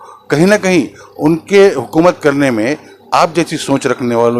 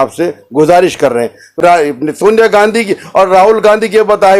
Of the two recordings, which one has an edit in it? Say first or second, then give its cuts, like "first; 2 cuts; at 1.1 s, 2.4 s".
second; 1 cut; at 1.5 s